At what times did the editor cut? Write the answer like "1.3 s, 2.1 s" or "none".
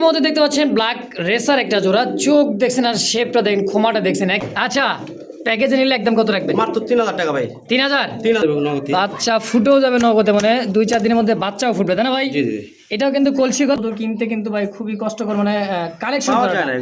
4.4 s, 8.4 s, 13.8 s